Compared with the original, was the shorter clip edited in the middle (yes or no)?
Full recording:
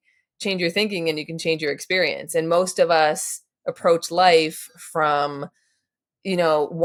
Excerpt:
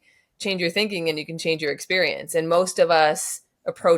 no